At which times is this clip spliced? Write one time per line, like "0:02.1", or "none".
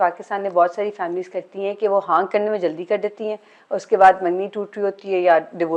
none